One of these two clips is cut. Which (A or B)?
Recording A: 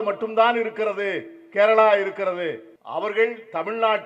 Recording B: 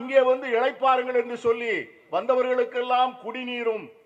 A